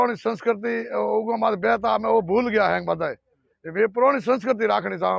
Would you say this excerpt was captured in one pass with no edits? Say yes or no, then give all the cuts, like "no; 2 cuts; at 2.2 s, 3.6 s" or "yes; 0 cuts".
yes; 0 cuts